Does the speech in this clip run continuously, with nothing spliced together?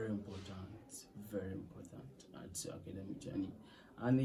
yes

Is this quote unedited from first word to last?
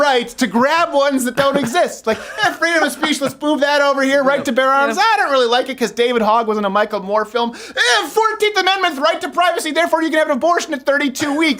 yes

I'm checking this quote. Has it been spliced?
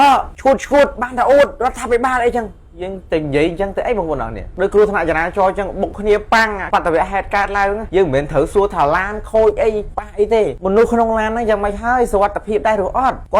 yes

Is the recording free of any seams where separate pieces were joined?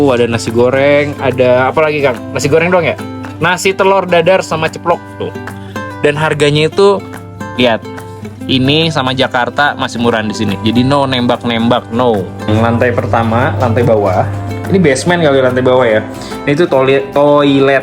no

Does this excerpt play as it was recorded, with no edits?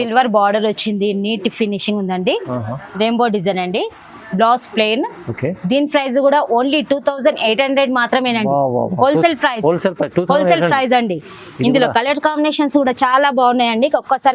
yes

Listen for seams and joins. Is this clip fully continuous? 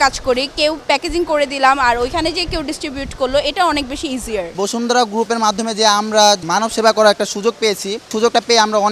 no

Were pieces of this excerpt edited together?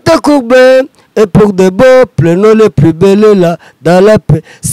no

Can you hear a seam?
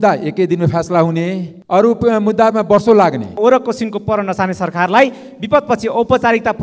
yes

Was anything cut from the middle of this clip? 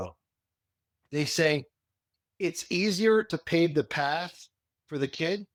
no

